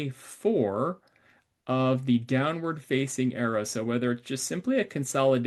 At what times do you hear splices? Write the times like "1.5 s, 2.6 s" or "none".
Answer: none